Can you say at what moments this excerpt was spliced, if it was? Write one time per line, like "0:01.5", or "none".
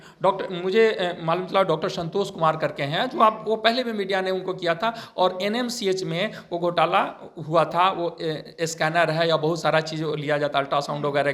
none